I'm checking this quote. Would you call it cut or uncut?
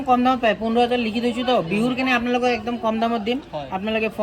uncut